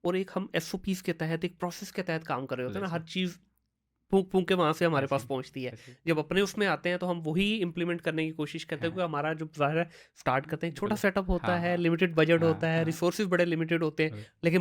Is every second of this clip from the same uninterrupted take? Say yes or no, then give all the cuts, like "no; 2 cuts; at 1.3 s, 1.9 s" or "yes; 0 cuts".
yes; 0 cuts